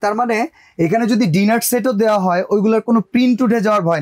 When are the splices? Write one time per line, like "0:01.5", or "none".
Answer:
none